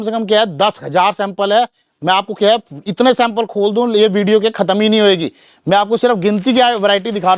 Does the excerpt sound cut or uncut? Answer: uncut